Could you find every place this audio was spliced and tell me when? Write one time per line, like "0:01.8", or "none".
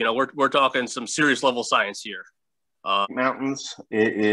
0:03.1